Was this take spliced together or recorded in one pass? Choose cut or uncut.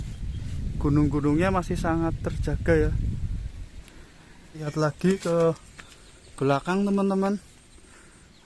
cut